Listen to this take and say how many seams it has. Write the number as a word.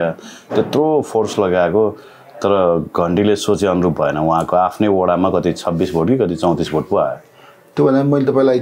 zero